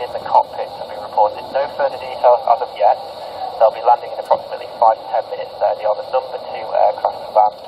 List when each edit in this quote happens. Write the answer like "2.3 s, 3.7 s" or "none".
5.3 s

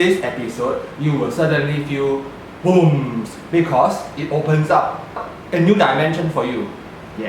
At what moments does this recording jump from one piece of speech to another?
5.3 s

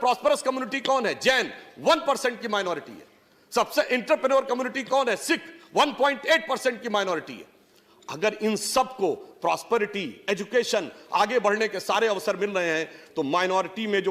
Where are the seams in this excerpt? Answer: none

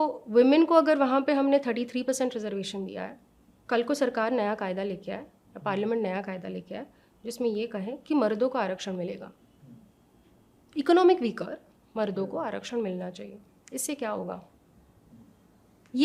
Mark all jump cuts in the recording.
none

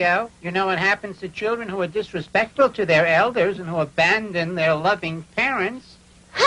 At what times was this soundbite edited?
none

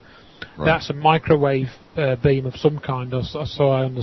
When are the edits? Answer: 1.5 s

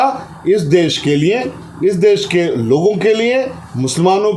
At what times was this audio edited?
none

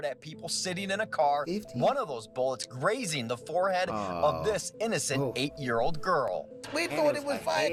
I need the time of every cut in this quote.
none

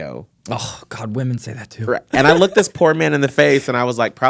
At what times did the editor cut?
none

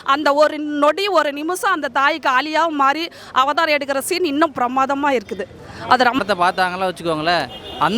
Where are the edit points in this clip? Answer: 6.2 s

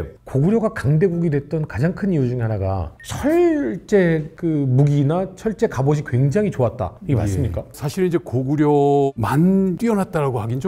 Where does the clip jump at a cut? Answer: none

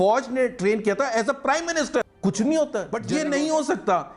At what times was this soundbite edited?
2.0 s, 3.0 s

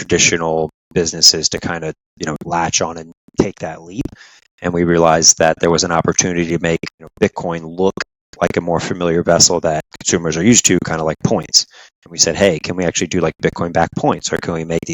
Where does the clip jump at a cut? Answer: 7.0 s, 9.9 s

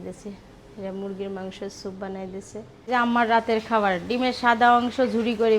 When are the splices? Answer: 2.9 s

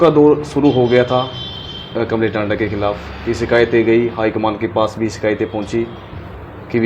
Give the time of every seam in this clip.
none

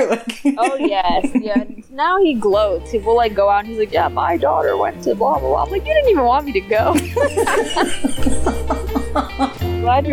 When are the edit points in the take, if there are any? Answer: none

